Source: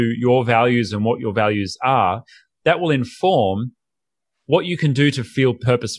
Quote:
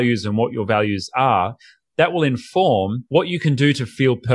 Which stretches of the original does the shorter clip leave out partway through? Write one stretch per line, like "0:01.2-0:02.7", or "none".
0:03.7-0:04.4